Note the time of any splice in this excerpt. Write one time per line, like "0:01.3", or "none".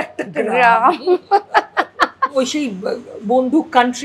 0:02.3